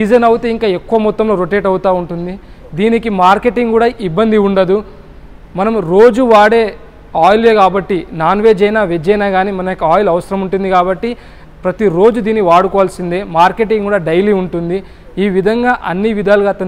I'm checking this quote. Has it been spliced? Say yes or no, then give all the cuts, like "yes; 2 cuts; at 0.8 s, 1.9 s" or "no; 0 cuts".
no; 0 cuts